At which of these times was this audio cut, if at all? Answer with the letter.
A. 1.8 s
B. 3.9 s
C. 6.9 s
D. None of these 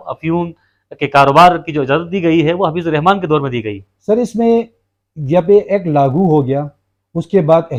D